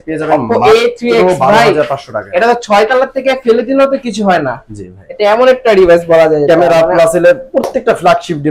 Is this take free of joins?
no; 1 cut; at 6.4 s

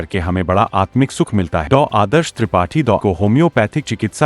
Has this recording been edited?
yes; 2 cuts; at 1.6 s, 3.0 s

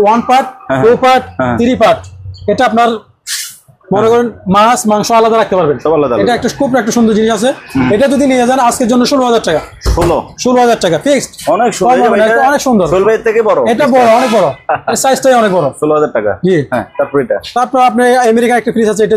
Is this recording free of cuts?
yes; 0 cuts

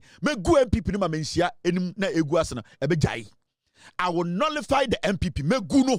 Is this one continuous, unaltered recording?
yes; 0 cuts

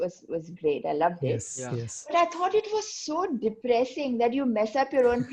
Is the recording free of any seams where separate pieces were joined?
yes; 0 cuts

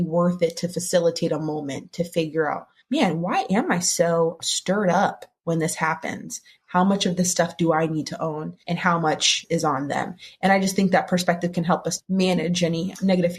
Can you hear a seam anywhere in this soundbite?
yes; 1 cut; at 12.0 s

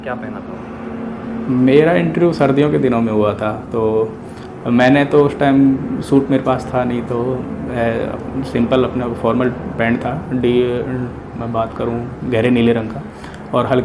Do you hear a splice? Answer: no; 0 cuts

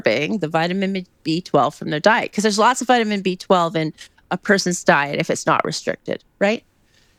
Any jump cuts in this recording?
no; 0 cuts

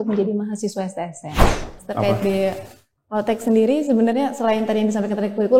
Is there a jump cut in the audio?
yes; 1 cut; at 1.5 s

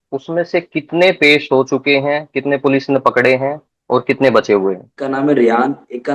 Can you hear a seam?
yes; 1 cut; at 4.9 s

